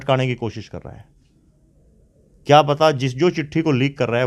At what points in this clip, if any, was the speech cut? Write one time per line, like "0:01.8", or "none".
none